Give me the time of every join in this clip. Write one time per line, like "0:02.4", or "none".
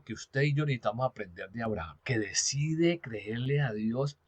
0:01.9